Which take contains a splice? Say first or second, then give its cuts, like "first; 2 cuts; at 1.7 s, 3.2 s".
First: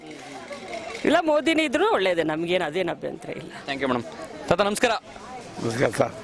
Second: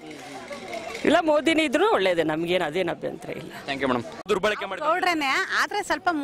second; 1 cut; at 4.2 s